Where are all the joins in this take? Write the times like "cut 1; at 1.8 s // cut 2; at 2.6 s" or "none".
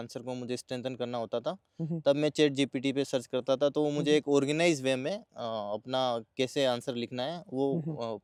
none